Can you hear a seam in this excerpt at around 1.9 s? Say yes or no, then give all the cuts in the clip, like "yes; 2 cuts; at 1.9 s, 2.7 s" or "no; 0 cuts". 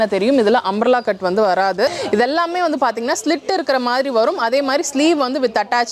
yes; 1 cut; at 1.9 s